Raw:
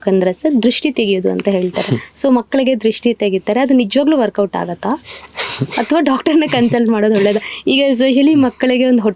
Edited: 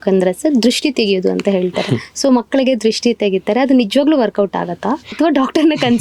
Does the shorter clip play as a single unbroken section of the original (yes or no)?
no